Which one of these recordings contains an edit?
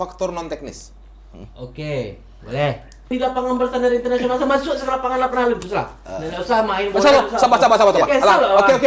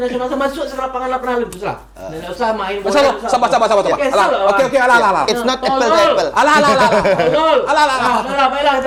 first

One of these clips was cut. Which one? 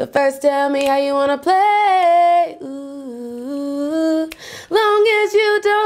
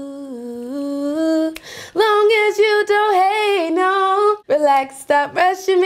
second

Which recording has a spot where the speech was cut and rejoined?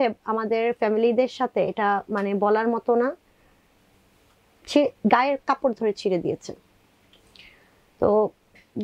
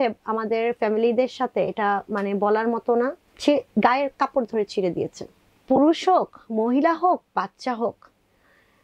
second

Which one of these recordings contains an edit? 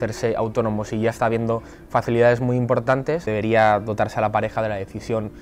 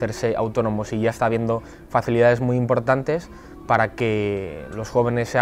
first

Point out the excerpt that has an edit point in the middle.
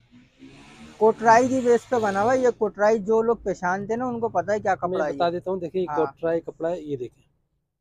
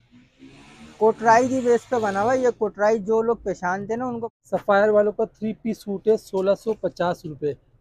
second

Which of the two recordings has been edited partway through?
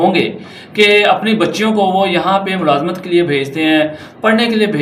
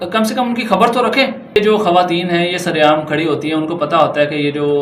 second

